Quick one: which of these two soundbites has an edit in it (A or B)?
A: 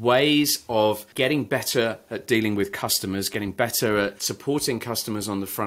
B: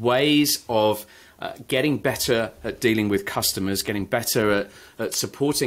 A